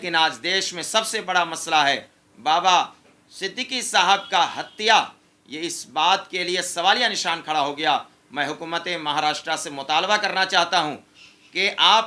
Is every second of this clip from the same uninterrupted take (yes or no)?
yes